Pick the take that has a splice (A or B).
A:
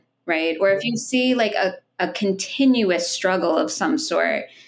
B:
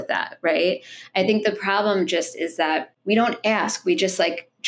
B